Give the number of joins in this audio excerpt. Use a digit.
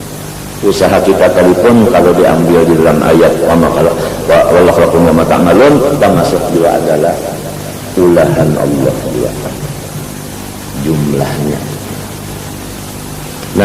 0